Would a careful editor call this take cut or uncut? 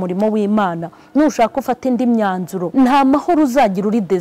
cut